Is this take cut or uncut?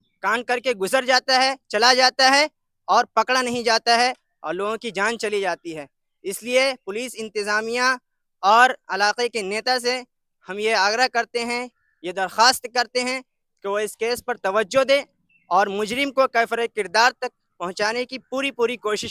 uncut